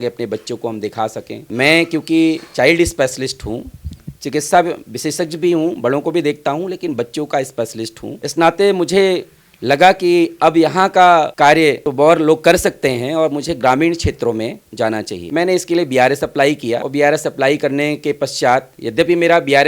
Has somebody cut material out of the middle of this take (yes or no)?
no